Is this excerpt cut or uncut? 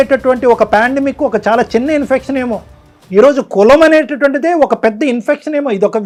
uncut